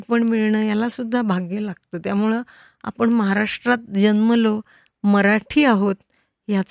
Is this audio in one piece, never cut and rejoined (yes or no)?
yes